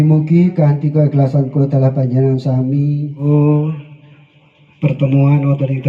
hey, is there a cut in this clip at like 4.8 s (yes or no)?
no